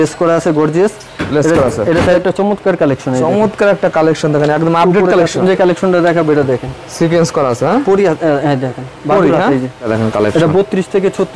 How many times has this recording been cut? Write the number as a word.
three